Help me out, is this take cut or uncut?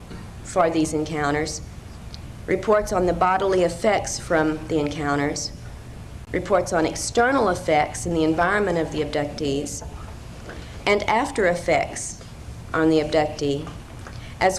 cut